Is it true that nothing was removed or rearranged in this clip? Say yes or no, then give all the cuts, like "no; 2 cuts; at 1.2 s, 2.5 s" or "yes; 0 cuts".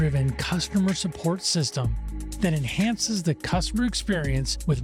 yes; 0 cuts